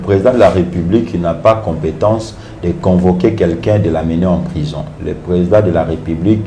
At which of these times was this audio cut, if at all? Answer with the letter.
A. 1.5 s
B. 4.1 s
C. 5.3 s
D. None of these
D